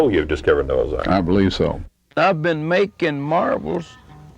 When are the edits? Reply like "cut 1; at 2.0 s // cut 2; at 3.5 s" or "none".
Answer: cut 1; at 2.0 s